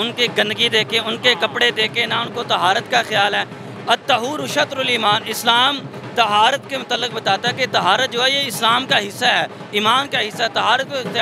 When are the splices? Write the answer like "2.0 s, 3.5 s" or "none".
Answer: none